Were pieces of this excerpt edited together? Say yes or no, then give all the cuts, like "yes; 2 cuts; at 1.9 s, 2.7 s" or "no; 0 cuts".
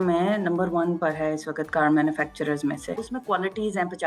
yes; 1 cut; at 3.1 s